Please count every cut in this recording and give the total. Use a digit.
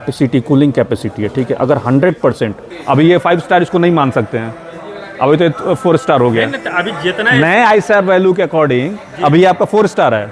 1